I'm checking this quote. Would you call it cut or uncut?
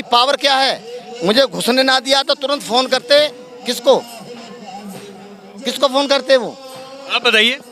uncut